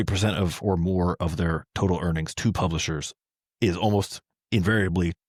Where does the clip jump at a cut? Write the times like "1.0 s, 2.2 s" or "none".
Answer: none